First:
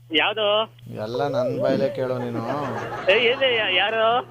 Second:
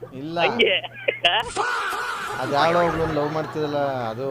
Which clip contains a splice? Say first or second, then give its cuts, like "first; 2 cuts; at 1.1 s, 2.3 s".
second; 1 cut; at 1.8 s